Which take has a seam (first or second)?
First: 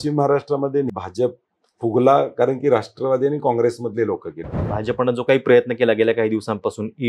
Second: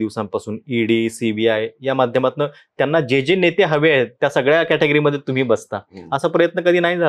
first